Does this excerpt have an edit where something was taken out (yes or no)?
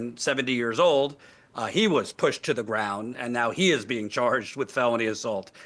yes